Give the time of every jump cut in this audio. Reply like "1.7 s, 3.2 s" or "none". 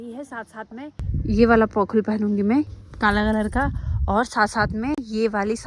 1.0 s, 2.8 s